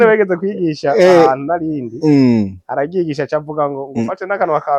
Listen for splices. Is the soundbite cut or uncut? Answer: uncut